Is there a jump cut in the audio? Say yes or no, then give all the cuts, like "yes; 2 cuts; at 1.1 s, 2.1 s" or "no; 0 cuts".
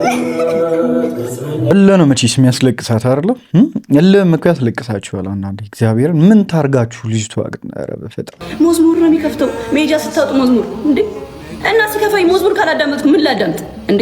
yes; 2 cuts; at 1.7 s, 8.4 s